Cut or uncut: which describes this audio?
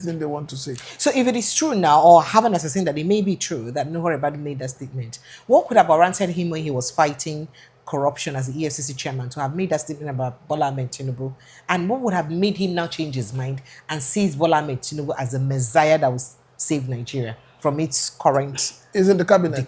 uncut